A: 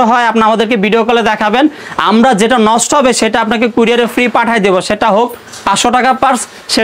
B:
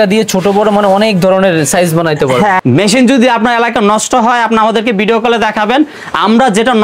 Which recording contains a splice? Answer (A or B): B